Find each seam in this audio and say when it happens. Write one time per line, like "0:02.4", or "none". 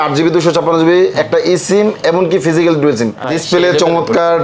0:03.3